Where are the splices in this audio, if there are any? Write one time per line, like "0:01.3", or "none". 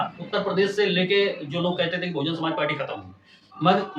none